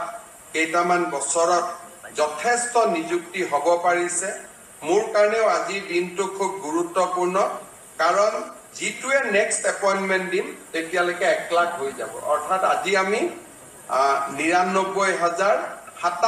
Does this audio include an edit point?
no; 0 cuts

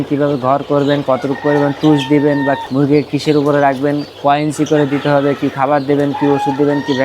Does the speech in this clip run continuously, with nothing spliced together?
no; 2 cuts; at 2.6 s, 4.1 s

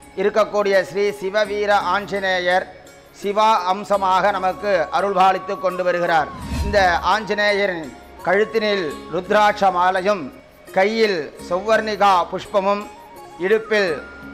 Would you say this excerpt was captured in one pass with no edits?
yes; 0 cuts

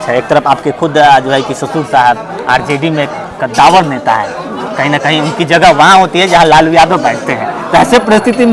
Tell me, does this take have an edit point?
no; 0 cuts

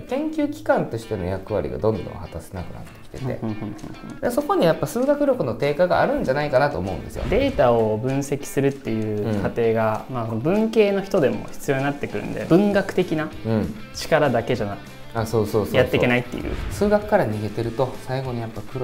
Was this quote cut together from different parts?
yes; 3 cuts; at 7.1 s, 12.4 s, 16.5 s

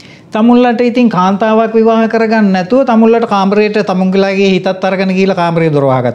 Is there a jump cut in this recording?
no; 0 cuts

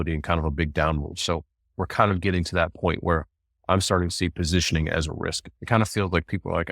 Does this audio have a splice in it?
yes; 1 cut; at 5.5 s

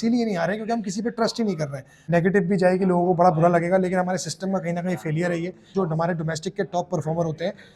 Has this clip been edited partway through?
yes; 2 cuts; at 1.9 s, 5.7 s

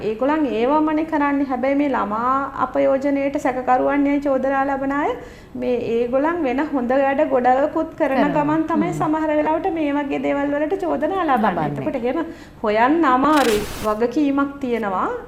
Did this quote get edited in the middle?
yes; 1 cut; at 13.7 s

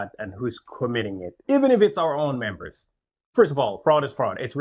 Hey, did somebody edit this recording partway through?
no; 0 cuts

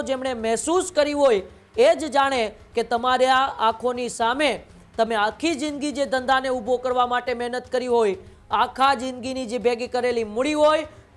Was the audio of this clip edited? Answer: no; 0 cuts

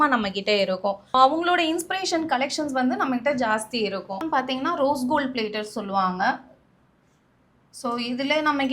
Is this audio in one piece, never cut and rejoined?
yes; 0 cuts

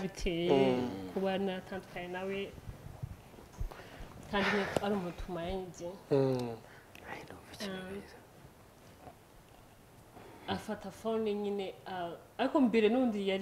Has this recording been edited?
no; 0 cuts

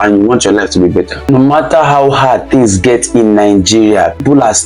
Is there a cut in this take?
yes; 1 cut; at 1.2 s

